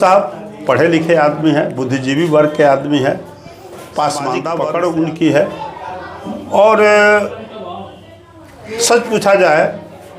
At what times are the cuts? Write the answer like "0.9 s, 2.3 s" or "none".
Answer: 4.6 s